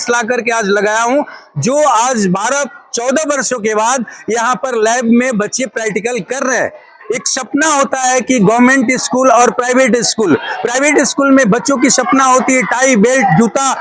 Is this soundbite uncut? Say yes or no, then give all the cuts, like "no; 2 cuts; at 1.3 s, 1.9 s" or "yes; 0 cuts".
no; 1 cut; at 7.0 s